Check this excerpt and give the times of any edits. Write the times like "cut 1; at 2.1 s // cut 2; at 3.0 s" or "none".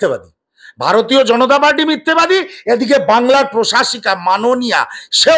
none